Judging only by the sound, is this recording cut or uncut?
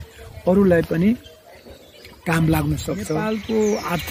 cut